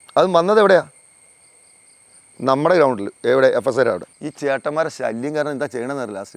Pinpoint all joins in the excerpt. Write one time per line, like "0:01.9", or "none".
0:04.2

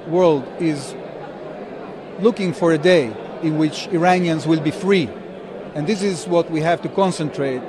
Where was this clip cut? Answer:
none

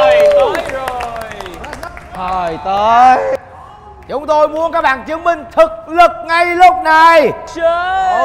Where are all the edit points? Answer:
none

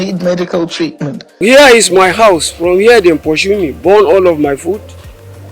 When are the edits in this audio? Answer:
0:01.3

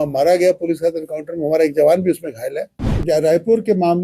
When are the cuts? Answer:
0:03.0

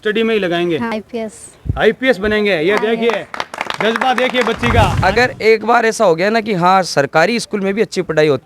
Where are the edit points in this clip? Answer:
0:01.0
0:04.9

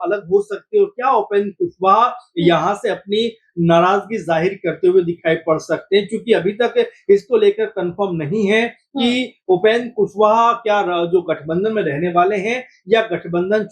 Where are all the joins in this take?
none

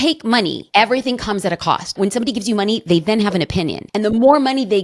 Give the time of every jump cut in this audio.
0:02.0
0:03.8

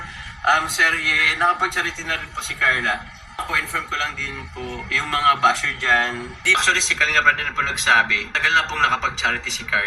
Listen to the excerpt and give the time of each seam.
0:03.4
0:06.6

